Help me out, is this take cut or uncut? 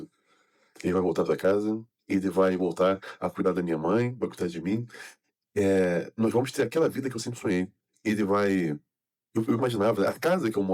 uncut